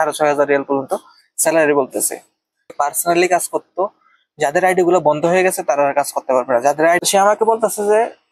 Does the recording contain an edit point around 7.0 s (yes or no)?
yes